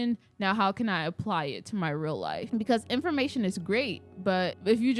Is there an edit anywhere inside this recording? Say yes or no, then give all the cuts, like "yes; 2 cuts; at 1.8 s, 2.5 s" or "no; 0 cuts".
yes; 1 cut; at 2.5 s